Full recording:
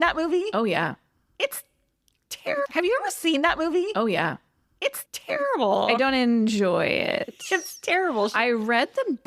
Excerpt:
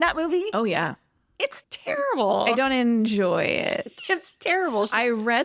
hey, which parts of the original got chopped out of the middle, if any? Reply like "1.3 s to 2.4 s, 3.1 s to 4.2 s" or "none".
1.6 s to 5.0 s